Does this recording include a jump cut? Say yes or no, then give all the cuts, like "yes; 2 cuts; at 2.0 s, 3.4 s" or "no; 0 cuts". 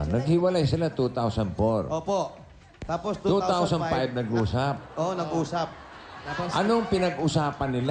no; 0 cuts